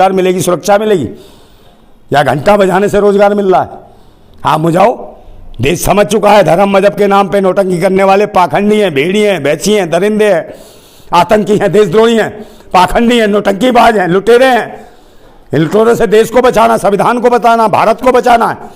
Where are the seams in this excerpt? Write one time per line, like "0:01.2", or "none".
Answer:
none